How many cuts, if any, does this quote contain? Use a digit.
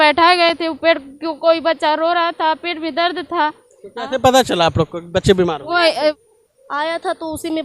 1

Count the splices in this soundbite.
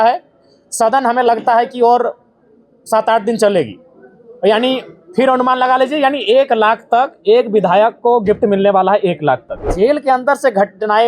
1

